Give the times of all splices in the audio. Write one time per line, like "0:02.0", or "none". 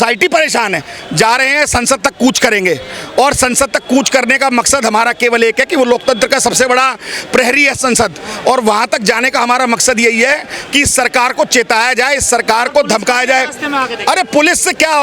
0:00.9